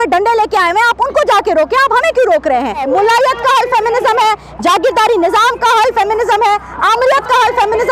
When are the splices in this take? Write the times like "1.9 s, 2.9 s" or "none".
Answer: 2.8 s